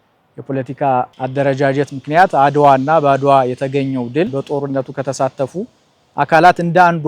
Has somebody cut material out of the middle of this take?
yes; 1 cut; at 4.3 s

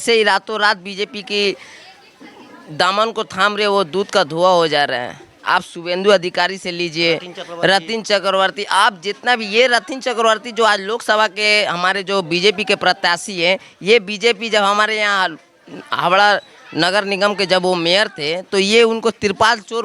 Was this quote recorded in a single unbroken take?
yes; 0 cuts

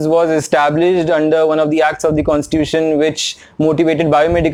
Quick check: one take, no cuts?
yes; 0 cuts

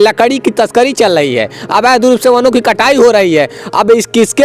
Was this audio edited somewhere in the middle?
no; 0 cuts

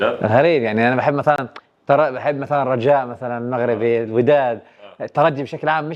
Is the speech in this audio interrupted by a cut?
no; 0 cuts

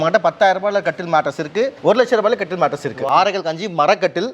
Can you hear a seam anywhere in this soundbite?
yes; 2 cuts; at 1.8 s, 3.1 s

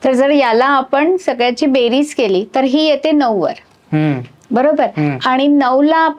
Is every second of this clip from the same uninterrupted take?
yes; 0 cuts

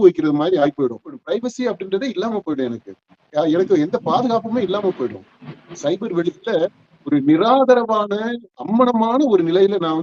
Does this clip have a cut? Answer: yes; 1 cut; at 1.1 s

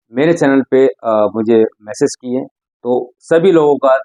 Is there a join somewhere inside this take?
no; 0 cuts

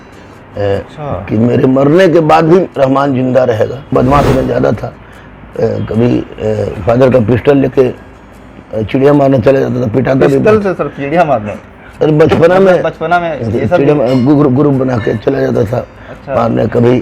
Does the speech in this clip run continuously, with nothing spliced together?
no; 1 cut; at 3.9 s

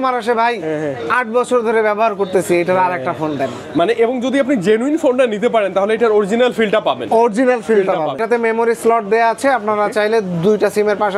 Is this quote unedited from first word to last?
no; 1 cut; at 8.2 s

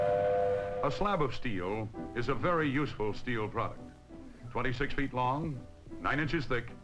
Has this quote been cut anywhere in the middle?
no; 0 cuts

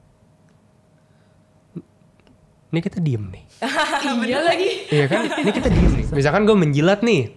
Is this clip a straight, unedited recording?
no; 1 cut; at 6.0 s

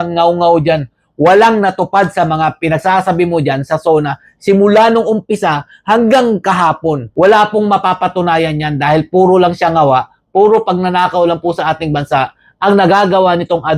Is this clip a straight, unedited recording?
yes; 0 cuts

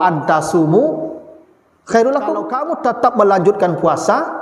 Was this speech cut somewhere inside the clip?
yes; 1 cut; at 2.6 s

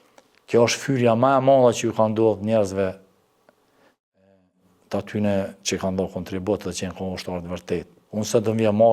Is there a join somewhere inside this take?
yes; 1 cut; at 8.0 s

